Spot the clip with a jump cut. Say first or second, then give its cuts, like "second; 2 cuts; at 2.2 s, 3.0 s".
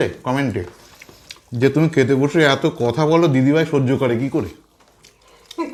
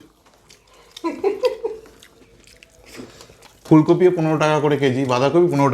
second; 1 cut; at 3.5 s